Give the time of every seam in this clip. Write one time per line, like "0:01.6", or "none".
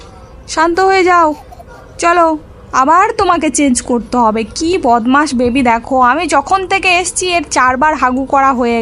none